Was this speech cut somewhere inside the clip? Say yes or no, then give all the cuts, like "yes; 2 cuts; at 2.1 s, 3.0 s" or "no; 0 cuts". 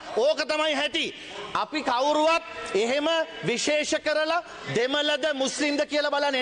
no; 0 cuts